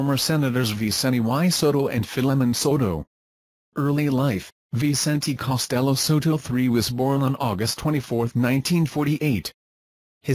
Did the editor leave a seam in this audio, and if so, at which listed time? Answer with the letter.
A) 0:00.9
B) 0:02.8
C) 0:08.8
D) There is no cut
C